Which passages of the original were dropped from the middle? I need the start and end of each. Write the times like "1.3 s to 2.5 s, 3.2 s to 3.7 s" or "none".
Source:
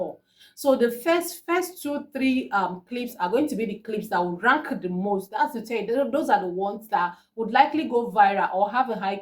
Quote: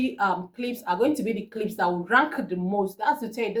none